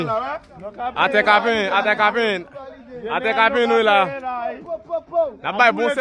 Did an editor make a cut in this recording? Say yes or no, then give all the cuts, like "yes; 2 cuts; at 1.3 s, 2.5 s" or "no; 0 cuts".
no; 0 cuts